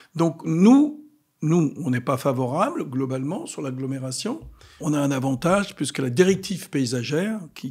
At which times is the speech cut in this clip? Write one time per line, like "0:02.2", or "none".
0:04.8